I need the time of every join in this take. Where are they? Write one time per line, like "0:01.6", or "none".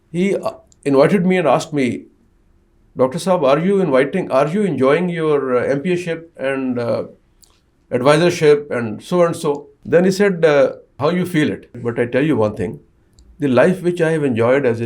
0:09.7
0:10.9
0:11.8